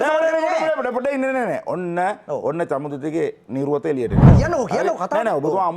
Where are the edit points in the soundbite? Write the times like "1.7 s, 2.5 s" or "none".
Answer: 4.3 s

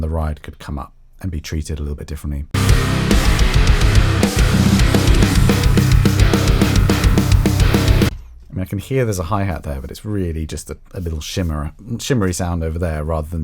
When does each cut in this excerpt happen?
2.4 s

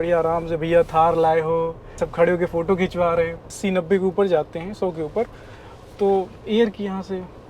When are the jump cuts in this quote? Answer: 2.0 s, 3.6 s

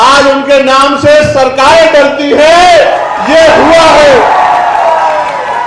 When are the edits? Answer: none

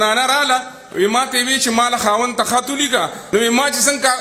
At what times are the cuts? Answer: 3.2 s

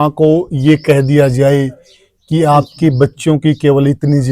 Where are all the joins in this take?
0.9 s

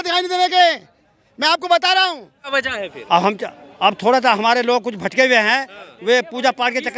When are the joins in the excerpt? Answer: 2.5 s

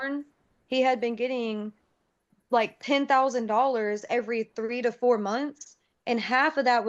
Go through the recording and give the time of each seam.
none

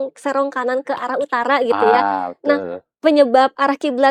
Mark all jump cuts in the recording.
none

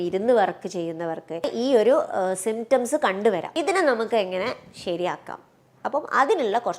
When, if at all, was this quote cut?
1.5 s, 3.5 s

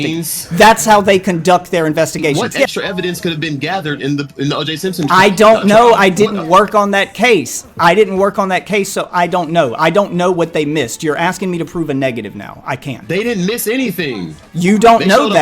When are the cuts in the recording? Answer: 2.3 s

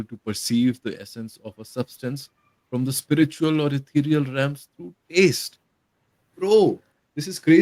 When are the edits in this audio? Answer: none

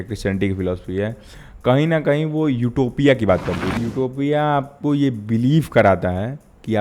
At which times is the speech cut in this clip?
3.7 s

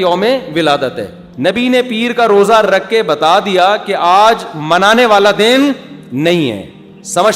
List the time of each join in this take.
1.2 s

